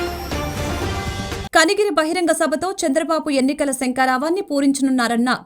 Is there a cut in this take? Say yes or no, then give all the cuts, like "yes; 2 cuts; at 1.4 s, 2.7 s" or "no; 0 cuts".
yes; 1 cut; at 1.1 s